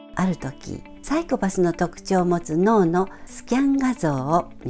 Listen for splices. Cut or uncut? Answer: cut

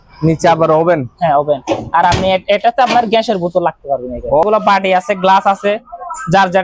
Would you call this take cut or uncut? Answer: cut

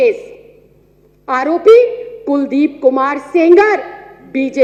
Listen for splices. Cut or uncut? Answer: uncut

